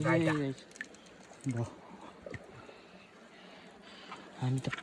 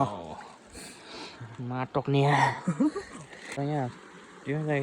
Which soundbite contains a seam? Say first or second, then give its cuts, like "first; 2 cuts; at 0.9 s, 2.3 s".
second; 1 cut; at 3.5 s